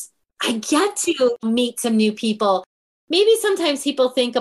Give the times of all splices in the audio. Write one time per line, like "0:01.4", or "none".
0:01.4
0:02.9